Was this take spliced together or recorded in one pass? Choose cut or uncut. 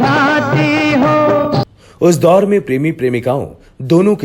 cut